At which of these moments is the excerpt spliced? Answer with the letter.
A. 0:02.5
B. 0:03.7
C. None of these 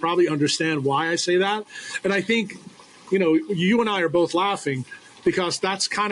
C